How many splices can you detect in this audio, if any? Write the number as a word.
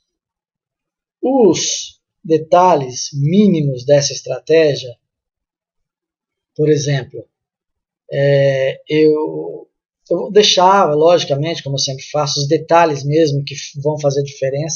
zero